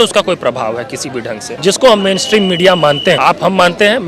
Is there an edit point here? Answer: yes; 2 cuts; at 1.5 s, 3.2 s

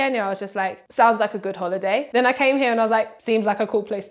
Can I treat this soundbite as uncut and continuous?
no; 2 cuts; at 2.1 s, 3.2 s

